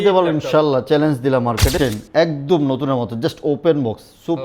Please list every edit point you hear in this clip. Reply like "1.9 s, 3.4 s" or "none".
1.8 s